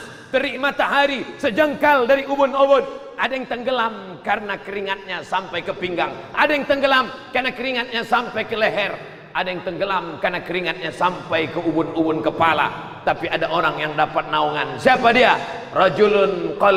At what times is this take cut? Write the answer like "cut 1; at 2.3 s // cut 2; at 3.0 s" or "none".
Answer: none